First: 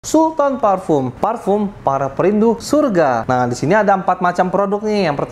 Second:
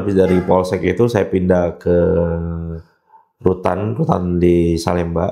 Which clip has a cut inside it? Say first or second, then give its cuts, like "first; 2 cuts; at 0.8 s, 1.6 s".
first; 3 cuts; at 1.1 s, 2.6 s, 3.2 s